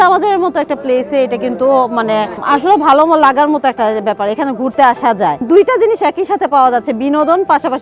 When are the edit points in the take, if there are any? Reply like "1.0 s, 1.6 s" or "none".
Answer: 2.4 s, 5.4 s